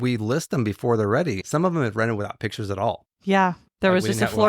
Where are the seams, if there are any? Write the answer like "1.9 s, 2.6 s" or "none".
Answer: 1.4 s